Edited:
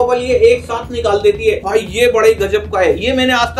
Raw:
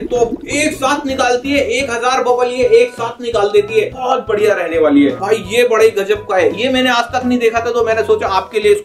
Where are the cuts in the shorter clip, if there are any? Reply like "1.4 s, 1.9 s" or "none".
1.6 s